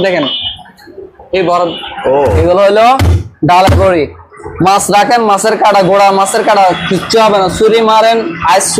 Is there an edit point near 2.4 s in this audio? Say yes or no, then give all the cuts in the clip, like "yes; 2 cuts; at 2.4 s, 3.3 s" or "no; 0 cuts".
yes; 1 cut; at 2.4 s